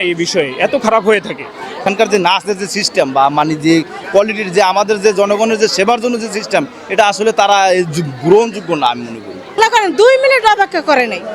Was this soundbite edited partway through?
yes; 2 cuts; at 1.8 s, 9.6 s

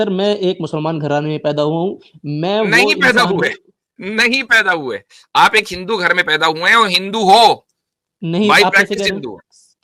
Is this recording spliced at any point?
no; 0 cuts

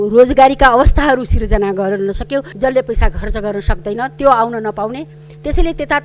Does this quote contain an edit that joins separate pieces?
yes; 1 cut; at 2.5 s

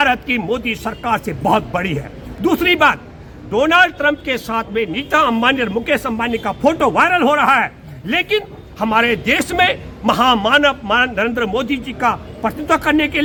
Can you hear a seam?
no; 0 cuts

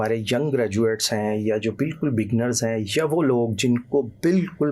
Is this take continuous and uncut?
yes; 0 cuts

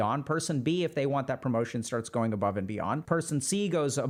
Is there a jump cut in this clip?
no; 0 cuts

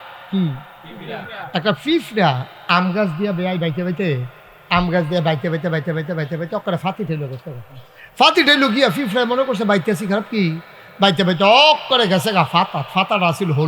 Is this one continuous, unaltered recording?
yes; 0 cuts

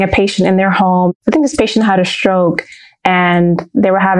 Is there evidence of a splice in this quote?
yes; 1 cut; at 1.1 s

